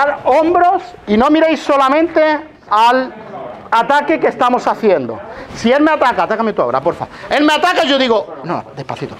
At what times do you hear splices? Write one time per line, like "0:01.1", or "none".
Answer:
none